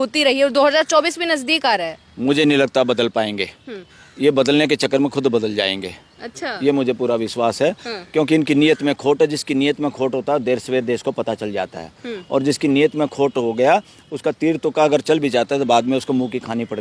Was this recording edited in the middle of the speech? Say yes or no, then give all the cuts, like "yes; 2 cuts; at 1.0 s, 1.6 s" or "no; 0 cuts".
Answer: no; 0 cuts